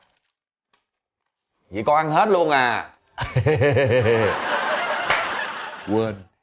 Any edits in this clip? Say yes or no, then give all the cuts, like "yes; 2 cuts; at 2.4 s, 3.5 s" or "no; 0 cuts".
no; 0 cuts